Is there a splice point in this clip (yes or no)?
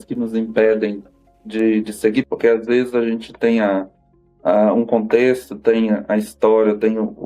yes